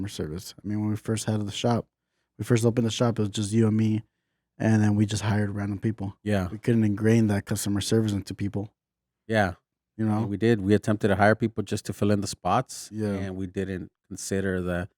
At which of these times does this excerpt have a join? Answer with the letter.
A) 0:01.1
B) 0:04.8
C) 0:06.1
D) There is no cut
C